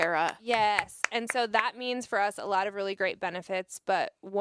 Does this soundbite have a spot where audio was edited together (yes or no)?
no